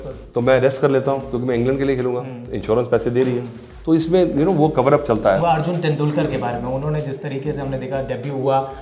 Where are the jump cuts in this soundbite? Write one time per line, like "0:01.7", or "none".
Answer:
0:05.4